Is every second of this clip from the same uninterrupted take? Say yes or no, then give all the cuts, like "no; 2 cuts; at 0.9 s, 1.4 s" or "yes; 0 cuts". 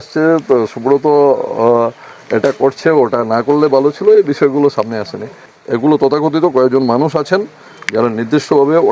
no; 1 cut; at 5.5 s